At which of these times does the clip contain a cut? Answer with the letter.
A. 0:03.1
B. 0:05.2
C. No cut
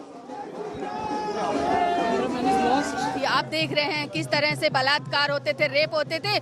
A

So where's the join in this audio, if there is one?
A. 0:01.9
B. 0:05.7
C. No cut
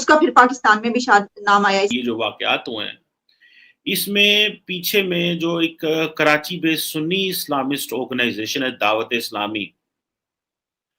A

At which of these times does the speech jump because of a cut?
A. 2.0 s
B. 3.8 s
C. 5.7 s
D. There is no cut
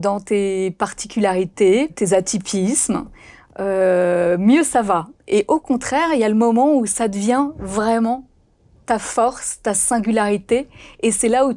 A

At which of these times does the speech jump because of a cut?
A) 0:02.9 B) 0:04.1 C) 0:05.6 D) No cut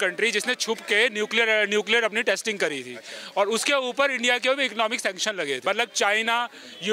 C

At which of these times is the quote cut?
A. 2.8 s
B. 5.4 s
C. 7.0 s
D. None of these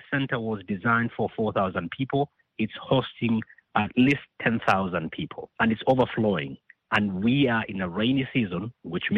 B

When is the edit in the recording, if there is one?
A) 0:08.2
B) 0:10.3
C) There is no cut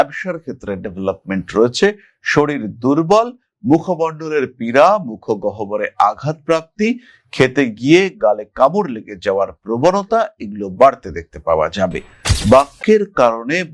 C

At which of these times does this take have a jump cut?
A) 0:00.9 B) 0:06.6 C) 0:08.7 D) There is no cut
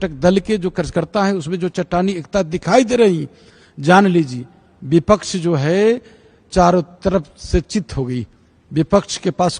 D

